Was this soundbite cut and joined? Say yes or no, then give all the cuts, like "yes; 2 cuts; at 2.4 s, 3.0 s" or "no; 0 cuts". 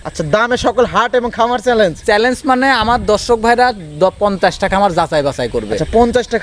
no; 0 cuts